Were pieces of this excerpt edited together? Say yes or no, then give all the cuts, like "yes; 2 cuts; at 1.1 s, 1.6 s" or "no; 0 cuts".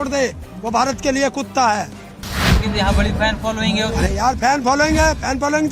yes; 1 cut; at 2.4 s